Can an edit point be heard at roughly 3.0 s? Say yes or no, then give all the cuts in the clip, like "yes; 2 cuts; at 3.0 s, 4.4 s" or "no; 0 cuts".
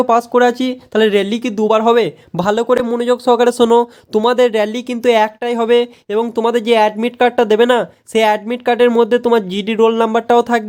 no; 0 cuts